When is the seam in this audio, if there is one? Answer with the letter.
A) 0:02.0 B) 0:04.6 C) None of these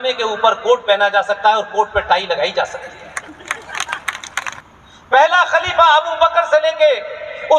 B